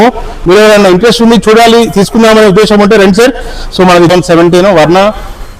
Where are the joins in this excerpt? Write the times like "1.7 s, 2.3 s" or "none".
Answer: 4.1 s